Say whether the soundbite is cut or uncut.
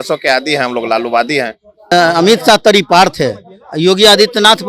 cut